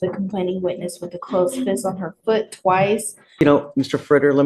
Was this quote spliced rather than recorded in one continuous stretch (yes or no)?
yes